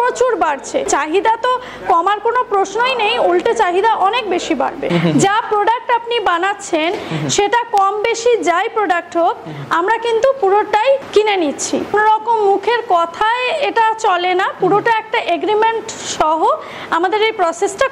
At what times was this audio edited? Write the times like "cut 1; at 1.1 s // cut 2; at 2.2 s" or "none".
cut 1; at 0.9 s // cut 2; at 4.8 s // cut 3; at 11.1 s // cut 4; at 11.9 s